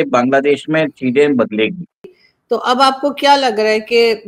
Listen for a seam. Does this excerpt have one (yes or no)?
no